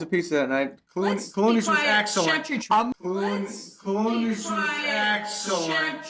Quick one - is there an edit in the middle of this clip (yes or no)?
no